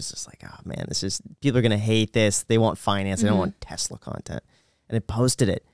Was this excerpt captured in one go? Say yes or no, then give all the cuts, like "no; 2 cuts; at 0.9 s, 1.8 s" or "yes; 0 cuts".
yes; 0 cuts